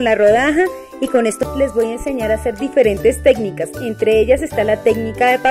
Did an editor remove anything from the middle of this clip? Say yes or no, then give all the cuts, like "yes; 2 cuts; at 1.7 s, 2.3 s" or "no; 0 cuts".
yes; 1 cut; at 1.4 s